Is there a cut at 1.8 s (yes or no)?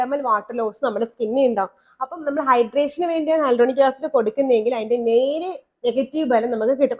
no